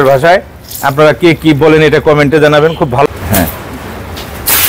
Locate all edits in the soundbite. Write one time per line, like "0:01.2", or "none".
0:03.1